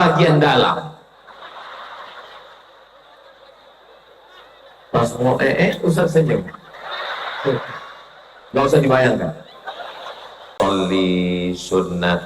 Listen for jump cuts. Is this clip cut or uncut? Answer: cut